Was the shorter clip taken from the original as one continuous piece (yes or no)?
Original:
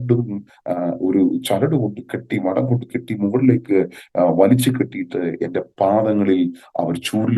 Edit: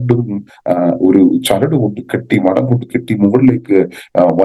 yes